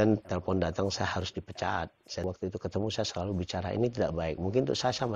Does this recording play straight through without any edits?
no; 1 cut; at 2.2 s

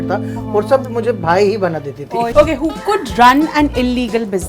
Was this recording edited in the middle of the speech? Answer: yes; 1 cut; at 2.3 s

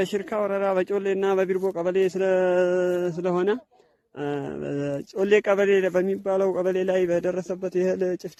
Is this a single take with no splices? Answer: yes; 0 cuts

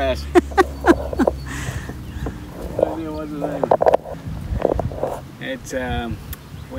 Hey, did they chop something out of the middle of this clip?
yes; 1 cut; at 4.1 s

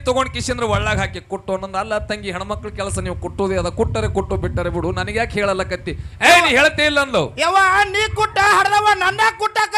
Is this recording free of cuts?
yes; 0 cuts

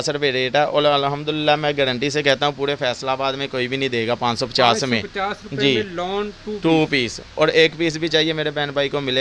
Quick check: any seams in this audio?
no; 0 cuts

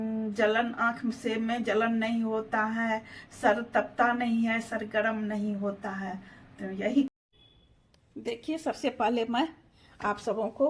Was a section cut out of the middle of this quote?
yes; 1 cut; at 7.1 s

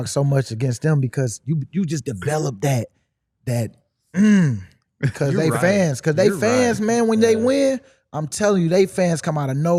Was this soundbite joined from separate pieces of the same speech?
no; 0 cuts

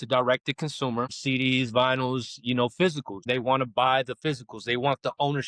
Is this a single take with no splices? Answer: no; 2 cuts; at 1.2 s, 3.2 s

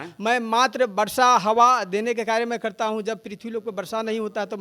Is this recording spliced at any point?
no; 0 cuts

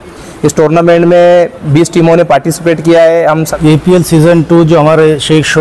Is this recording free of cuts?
no; 1 cut; at 3.5 s

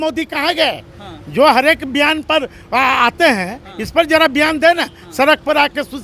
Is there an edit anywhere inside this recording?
no; 0 cuts

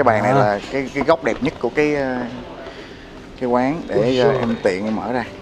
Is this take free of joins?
yes; 0 cuts

